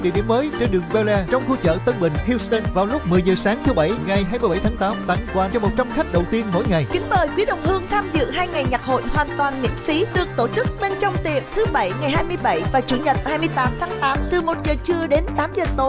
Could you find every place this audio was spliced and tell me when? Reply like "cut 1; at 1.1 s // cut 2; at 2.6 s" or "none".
none